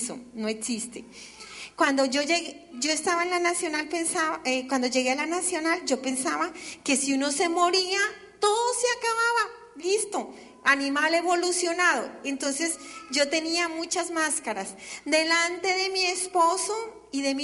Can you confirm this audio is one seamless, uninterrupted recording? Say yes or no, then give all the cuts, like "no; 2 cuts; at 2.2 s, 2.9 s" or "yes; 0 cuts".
no; 1 cut; at 7.5 s